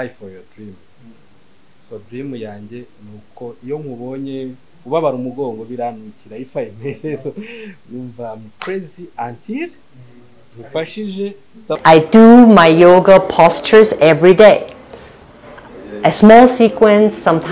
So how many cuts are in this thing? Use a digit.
1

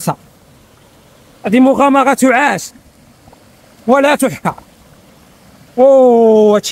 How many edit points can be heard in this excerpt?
0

